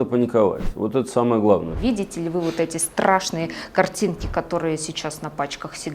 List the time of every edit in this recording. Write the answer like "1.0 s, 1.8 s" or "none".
1.7 s